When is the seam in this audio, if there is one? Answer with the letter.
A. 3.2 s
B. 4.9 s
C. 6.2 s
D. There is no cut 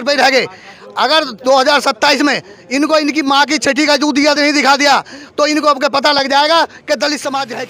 D